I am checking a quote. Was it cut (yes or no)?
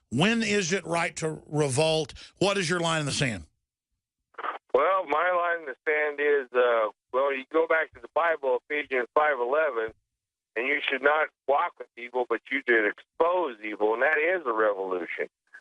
yes